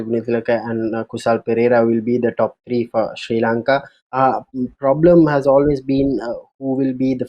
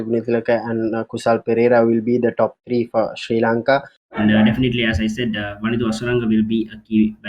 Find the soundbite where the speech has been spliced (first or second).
second